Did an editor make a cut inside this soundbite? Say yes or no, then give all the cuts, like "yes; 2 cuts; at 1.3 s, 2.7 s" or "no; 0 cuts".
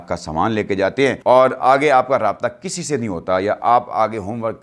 yes; 1 cut; at 1.2 s